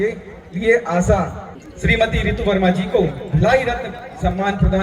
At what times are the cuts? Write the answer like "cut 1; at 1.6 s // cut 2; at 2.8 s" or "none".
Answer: cut 1; at 1.4 s